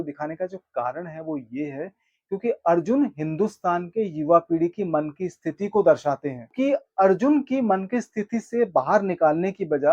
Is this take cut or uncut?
cut